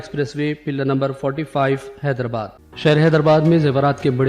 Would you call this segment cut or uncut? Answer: cut